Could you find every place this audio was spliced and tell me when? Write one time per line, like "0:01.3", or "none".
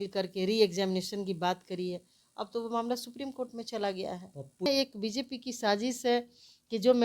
0:04.7